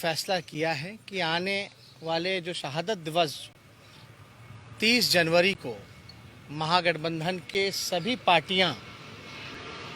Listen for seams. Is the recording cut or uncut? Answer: uncut